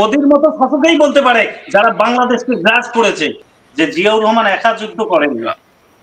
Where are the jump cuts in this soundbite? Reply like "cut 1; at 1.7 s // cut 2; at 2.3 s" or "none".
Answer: cut 1; at 3.3 s